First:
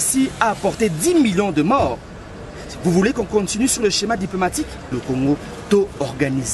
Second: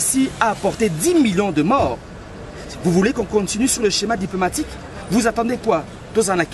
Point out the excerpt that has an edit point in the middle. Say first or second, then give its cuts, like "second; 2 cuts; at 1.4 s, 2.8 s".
first; 1 cut; at 5.0 s